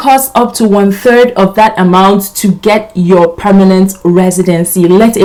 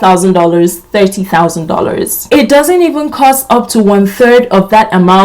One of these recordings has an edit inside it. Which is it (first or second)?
second